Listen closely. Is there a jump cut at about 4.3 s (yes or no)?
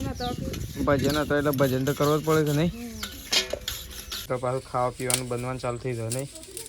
yes